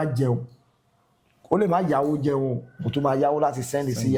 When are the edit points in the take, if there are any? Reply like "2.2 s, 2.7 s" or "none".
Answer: none